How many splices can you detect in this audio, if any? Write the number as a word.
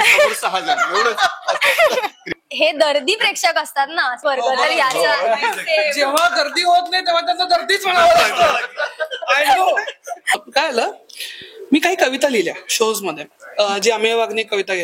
three